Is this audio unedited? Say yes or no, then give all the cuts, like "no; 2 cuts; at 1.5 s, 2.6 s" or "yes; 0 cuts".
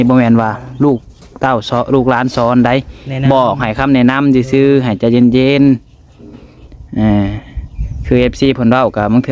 yes; 0 cuts